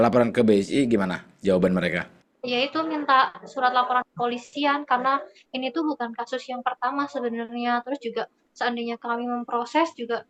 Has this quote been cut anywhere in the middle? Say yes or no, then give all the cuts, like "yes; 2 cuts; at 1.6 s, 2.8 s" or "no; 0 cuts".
no; 0 cuts